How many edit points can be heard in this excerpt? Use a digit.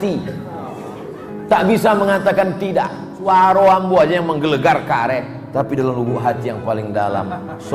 1